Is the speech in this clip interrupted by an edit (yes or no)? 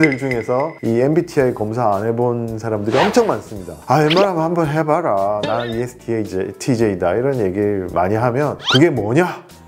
no